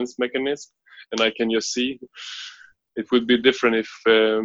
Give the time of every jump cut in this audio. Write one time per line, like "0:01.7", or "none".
0:02.1